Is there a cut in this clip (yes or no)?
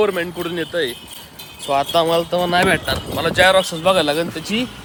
no